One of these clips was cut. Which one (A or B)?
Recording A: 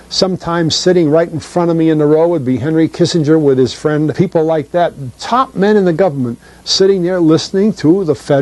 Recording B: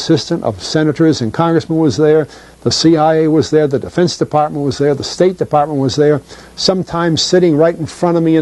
A